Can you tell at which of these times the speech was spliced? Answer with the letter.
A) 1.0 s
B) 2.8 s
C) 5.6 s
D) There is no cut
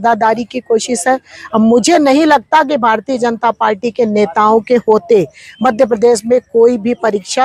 D